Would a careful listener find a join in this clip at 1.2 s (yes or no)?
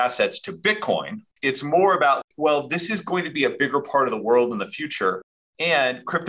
yes